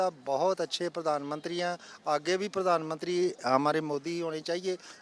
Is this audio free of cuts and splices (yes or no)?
yes